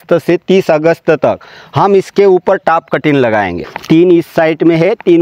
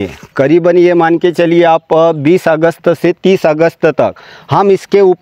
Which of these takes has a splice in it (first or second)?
first